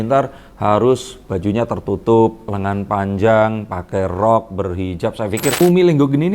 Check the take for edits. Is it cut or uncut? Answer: cut